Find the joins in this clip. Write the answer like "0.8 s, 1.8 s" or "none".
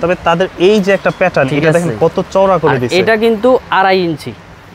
none

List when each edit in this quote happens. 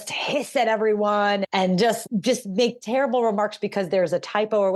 none

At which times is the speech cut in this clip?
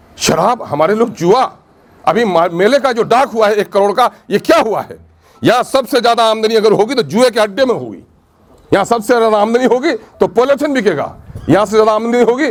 none

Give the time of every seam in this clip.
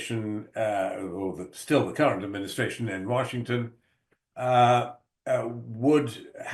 none

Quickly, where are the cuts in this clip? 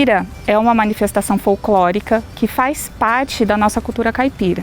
none

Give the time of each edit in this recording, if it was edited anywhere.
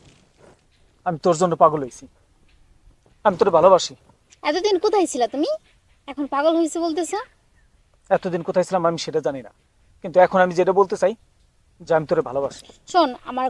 none

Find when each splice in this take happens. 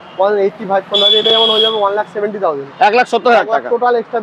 none

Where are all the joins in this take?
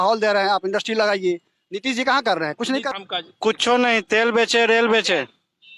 3.0 s

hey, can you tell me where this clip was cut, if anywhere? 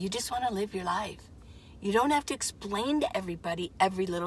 none

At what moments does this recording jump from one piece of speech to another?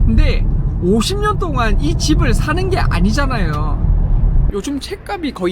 4.4 s

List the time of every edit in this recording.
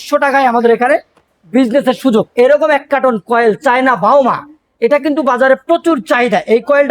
2.3 s

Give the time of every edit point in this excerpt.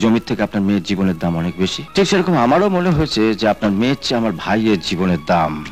1.8 s

